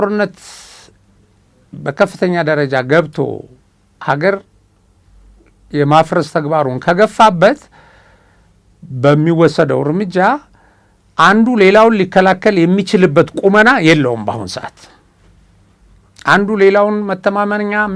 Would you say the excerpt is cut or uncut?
uncut